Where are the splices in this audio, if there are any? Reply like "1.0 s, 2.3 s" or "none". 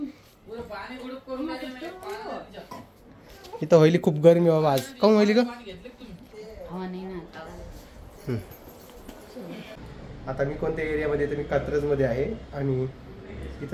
9.7 s